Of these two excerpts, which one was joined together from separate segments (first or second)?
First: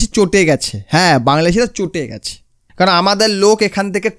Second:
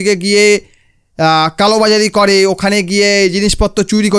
first